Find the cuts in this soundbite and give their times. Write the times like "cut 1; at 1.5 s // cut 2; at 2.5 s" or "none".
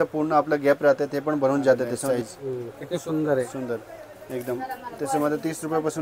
cut 1; at 2.1 s